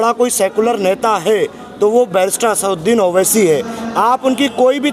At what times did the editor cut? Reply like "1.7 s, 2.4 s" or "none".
none

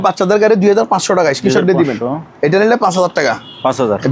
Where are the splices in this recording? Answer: none

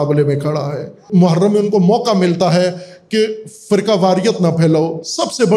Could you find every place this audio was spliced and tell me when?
1.0 s

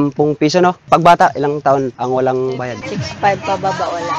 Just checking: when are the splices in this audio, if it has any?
0.8 s, 1.9 s, 2.8 s

